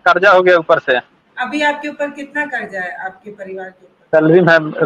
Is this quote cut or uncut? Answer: cut